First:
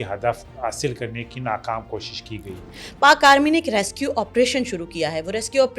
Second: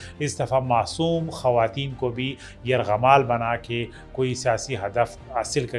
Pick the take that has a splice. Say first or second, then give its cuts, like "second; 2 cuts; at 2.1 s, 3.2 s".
first; 1 cut; at 2.6 s